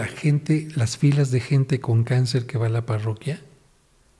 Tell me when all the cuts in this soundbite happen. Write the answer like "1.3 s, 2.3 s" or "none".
none